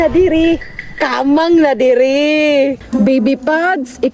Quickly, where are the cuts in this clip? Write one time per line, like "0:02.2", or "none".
0:02.8